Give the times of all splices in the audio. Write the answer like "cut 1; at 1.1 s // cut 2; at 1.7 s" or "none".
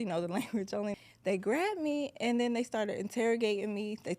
cut 1; at 0.9 s